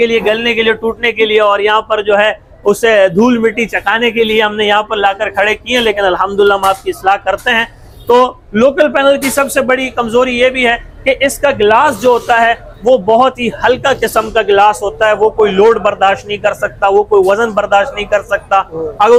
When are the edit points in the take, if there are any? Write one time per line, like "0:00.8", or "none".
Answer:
none